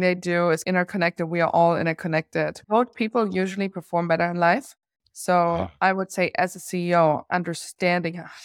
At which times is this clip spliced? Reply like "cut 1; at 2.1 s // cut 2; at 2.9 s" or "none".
cut 1; at 2.6 s